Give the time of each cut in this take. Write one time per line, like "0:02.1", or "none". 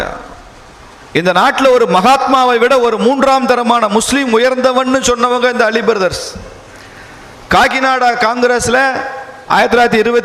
none